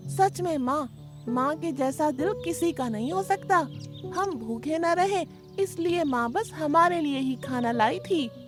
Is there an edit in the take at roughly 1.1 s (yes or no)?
no